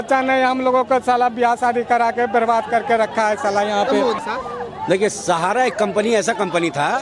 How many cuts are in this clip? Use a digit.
1